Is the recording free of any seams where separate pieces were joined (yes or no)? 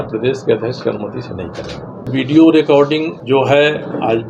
no